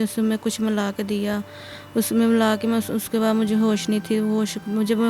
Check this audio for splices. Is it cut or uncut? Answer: uncut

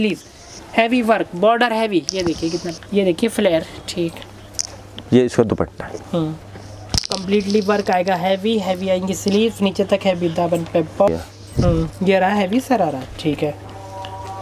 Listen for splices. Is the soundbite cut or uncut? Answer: cut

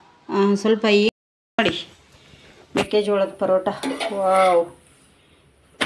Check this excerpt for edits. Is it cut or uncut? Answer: cut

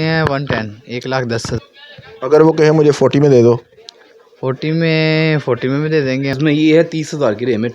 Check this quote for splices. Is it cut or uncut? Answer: cut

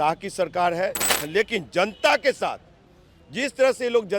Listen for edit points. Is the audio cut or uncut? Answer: cut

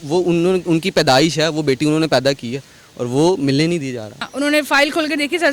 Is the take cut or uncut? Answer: cut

